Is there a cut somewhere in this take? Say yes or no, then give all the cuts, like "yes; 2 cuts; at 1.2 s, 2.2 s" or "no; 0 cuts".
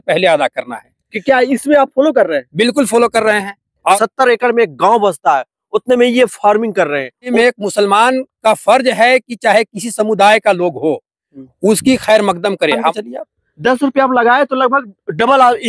yes; 3 cuts; at 3.9 s, 7.3 s, 12.9 s